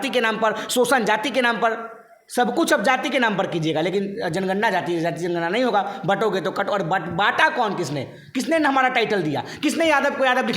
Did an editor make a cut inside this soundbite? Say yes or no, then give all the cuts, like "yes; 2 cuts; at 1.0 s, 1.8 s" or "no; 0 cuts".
no; 0 cuts